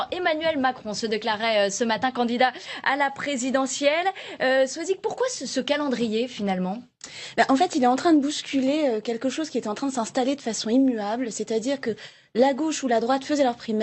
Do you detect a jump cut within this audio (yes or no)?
no